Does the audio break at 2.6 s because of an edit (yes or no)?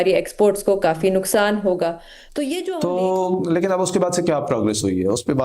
yes